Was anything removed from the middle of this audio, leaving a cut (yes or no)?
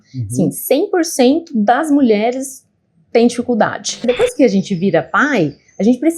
yes